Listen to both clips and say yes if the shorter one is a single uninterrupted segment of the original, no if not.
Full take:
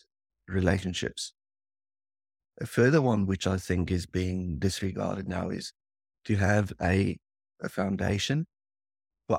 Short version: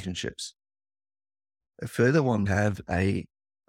no